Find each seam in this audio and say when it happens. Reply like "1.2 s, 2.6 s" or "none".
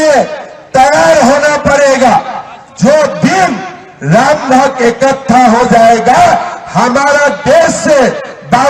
none